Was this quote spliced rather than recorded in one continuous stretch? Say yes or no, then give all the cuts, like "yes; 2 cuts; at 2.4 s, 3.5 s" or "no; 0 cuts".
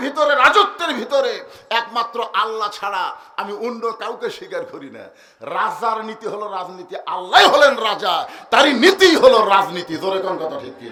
no; 0 cuts